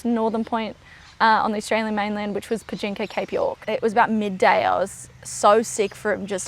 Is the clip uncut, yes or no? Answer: no